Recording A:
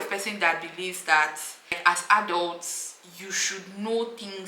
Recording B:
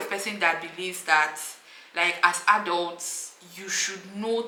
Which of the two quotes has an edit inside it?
A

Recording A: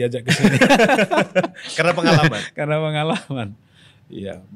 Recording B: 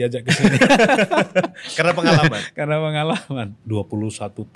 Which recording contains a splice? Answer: B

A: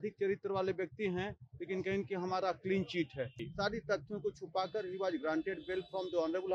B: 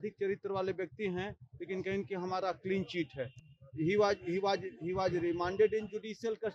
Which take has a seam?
A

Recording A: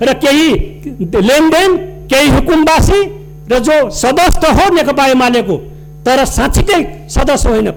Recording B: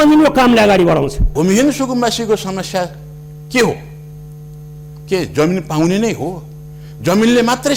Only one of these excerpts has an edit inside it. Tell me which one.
B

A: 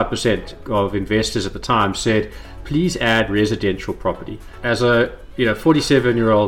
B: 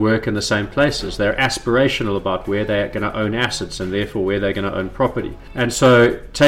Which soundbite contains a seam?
B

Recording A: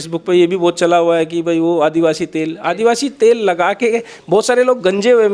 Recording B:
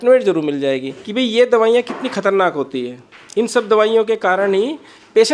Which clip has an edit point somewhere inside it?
B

